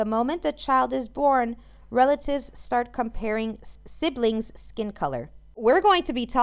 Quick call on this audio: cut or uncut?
cut